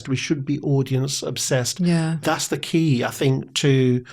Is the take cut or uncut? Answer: cut